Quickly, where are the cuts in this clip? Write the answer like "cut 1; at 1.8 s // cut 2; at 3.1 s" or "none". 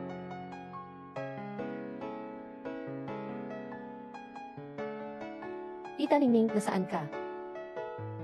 cut 1; at 4.3 s // cut 2; at 5.9 s // cut 3; at 7.0 s